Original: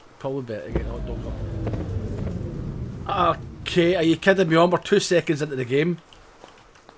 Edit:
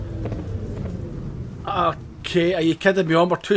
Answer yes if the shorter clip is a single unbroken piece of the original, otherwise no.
yes